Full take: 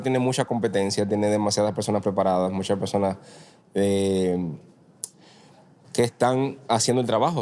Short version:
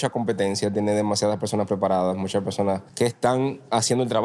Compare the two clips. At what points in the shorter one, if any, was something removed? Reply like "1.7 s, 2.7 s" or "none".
2.9 s

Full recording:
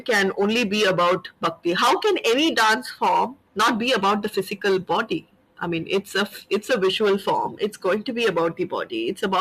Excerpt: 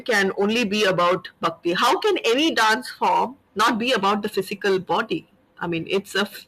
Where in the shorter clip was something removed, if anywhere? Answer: none

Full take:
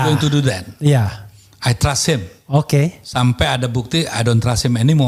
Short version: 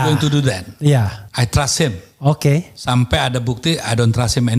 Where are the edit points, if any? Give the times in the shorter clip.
1.2 s

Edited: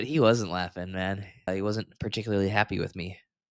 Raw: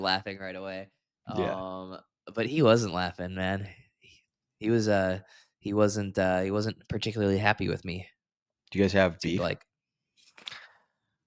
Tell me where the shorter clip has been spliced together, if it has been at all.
1.5 s

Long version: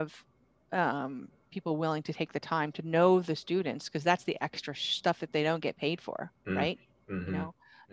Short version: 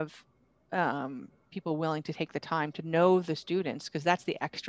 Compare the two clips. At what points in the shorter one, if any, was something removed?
none

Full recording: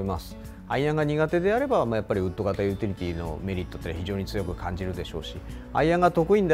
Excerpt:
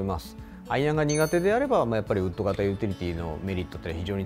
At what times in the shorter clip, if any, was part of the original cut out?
none

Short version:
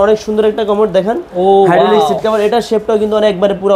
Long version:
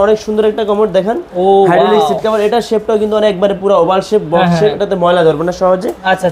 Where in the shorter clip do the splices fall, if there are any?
none

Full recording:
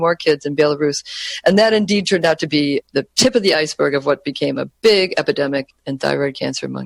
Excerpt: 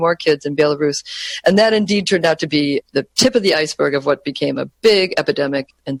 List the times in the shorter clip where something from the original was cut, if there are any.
none

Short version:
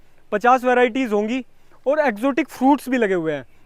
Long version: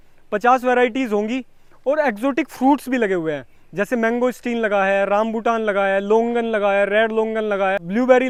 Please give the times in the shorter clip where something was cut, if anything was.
none

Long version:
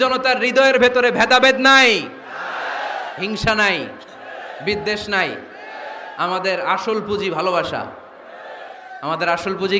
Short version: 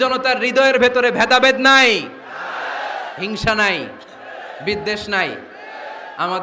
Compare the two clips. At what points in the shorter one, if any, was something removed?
none

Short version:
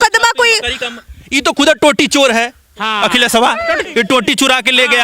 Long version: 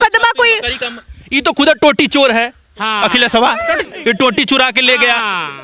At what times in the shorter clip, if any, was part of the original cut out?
3.8 s

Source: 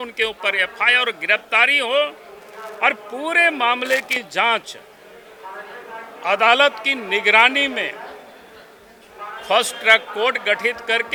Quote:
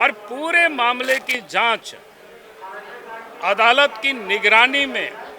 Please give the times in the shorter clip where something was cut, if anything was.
none

